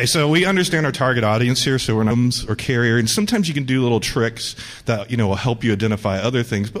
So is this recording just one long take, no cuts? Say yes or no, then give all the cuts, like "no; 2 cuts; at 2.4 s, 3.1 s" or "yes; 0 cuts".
yes; 0 cuts